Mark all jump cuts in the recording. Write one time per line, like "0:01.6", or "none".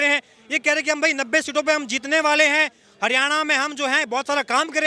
none